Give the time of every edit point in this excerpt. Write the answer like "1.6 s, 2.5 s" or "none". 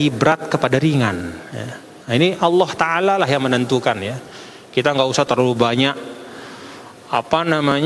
none